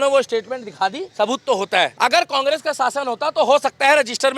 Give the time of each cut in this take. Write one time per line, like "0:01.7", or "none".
0:01.0
0:01.9